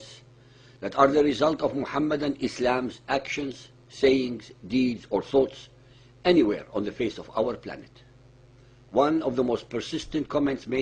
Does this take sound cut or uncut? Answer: uncut